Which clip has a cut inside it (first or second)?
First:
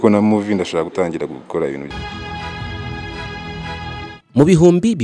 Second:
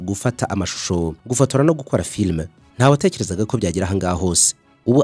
first